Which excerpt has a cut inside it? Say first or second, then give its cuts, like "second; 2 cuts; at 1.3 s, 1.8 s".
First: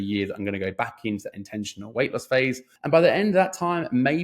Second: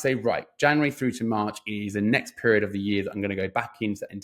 first; 1 cut; at 2.7 s